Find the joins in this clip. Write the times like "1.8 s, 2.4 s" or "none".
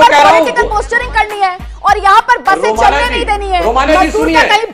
none